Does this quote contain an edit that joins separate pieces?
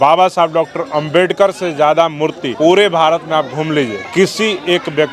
yes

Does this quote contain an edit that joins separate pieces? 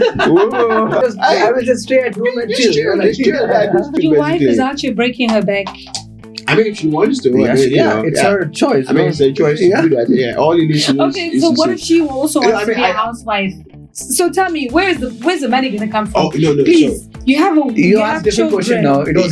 yes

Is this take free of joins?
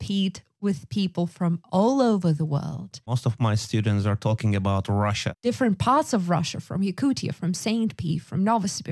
no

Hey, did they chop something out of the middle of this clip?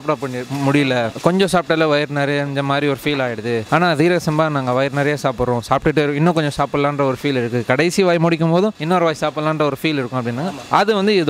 no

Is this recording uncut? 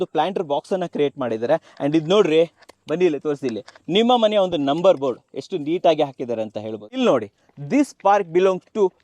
no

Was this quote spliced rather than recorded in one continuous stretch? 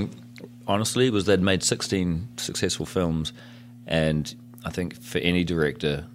no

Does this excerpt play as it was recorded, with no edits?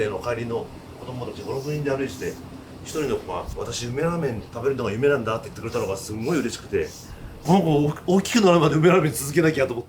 no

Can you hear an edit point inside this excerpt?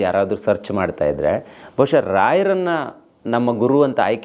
no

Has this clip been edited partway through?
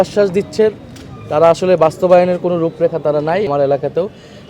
yes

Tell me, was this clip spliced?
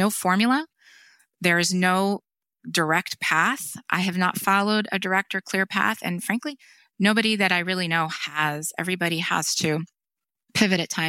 no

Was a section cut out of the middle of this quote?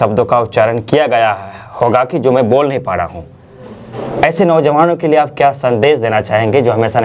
no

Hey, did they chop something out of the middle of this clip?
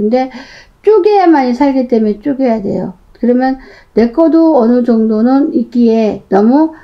no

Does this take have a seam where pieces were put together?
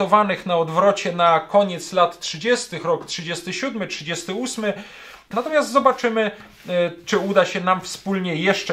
yes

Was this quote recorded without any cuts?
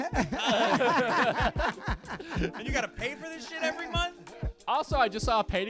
yes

